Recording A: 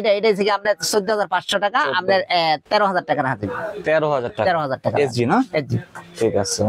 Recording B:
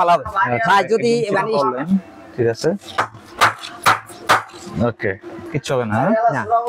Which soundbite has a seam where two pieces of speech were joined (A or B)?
B